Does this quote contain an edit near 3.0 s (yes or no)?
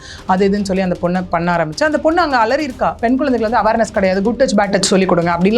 yes